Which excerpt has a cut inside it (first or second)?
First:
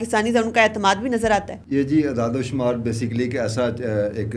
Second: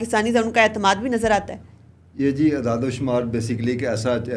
first